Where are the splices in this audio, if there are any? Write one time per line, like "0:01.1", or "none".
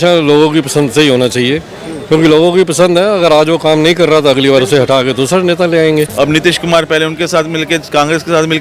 0:06.1